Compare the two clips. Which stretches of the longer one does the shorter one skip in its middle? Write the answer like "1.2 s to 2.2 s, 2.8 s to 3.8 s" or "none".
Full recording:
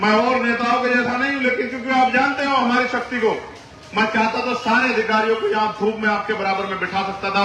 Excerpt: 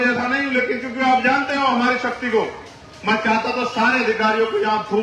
none